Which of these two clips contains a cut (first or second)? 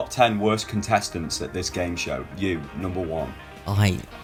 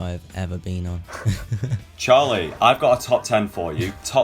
second